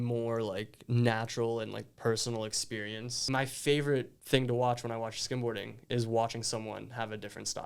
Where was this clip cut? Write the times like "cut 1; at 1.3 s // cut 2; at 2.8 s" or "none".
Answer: cut 1; at 3.2 s // cut 2; at 4.2 s